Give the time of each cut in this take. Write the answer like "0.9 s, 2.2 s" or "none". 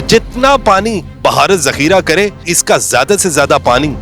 1.1 s, 2.5 s